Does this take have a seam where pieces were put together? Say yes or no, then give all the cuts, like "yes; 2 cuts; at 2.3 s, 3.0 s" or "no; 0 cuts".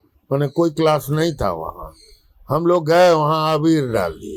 no; 0 cuts